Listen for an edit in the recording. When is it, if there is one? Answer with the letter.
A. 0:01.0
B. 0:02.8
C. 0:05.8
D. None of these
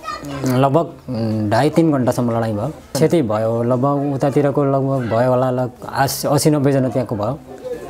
B